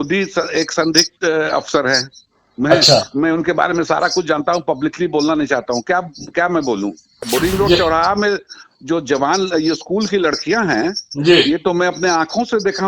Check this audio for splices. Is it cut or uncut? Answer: cut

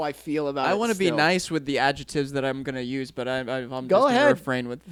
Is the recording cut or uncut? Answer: uncut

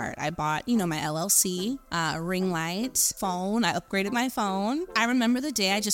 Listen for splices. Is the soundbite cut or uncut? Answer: cut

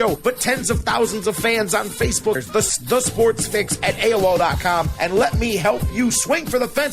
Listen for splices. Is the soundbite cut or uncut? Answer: cut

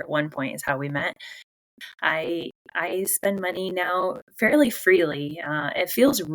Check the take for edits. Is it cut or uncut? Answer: cut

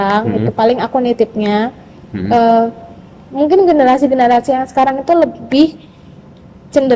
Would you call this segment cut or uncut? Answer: uncut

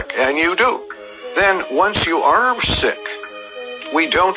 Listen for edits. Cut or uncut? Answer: cut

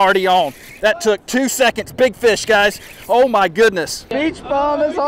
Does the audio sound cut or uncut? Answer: cut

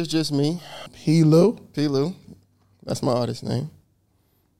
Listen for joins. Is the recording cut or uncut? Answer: cut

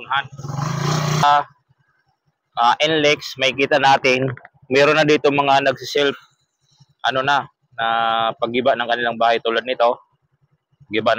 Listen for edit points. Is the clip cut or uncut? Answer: cut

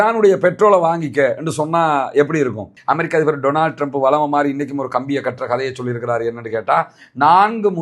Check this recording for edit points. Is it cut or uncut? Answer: cut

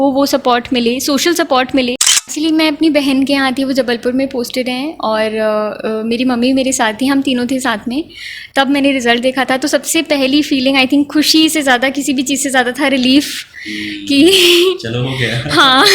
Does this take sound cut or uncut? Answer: cut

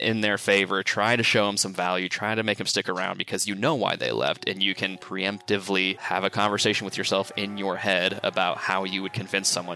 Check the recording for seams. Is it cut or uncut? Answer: cut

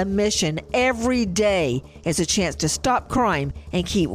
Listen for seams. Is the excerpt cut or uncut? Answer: uncut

